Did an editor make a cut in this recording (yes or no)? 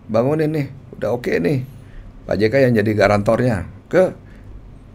no